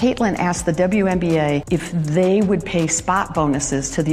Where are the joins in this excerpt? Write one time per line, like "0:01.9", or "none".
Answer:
none